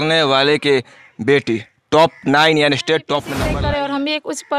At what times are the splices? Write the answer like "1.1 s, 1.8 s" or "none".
3.3 s